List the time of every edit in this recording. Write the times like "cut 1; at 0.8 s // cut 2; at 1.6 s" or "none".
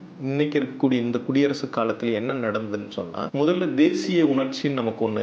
cut 1; at 3.2 s